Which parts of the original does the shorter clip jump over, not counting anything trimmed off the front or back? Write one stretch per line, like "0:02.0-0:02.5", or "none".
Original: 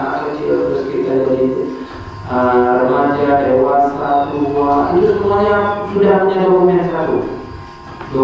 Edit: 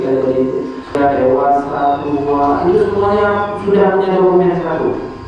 0:02.0-0:03.2